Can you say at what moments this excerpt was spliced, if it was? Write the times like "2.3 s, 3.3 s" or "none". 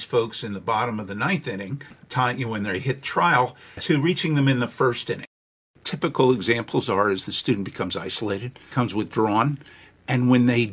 1.9 s, 3.8 s, 5.4 s, 8.6 s